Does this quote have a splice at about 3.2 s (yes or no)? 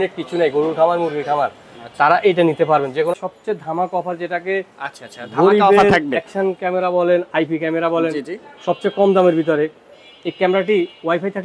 yes